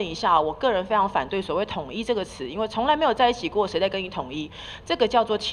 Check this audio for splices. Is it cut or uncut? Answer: uncut